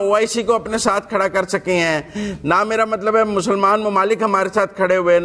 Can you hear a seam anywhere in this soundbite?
no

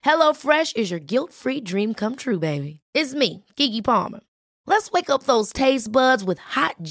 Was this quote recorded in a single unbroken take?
yes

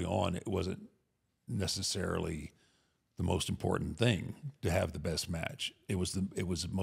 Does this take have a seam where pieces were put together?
no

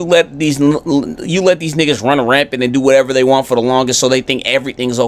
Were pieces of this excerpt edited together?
no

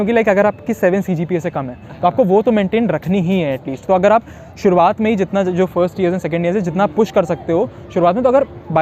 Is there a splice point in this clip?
no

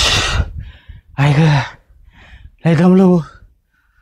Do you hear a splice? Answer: no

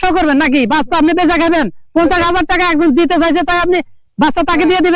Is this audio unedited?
yes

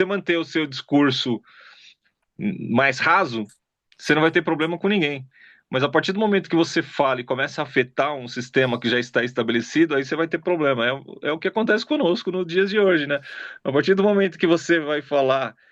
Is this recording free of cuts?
yes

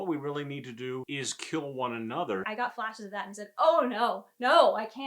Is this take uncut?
no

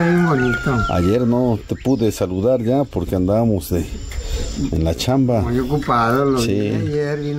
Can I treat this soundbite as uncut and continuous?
yes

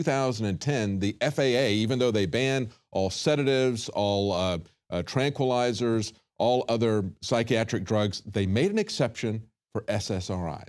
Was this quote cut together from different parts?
yes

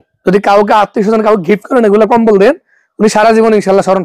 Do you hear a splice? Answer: no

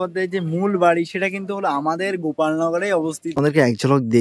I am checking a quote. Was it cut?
yes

